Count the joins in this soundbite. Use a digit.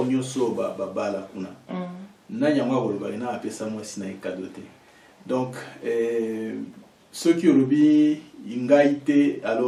0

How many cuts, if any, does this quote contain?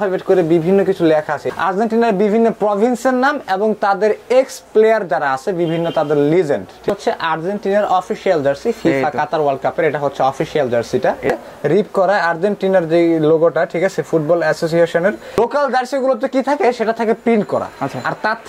4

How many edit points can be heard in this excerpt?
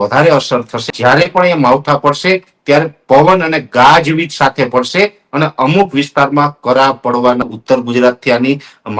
2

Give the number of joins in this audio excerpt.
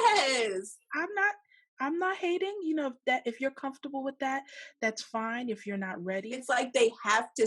1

